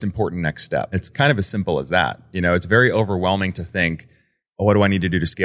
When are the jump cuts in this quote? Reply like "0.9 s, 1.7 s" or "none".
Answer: 1.1 s